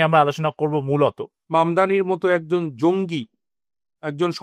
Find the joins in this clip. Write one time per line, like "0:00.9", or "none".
0:01.3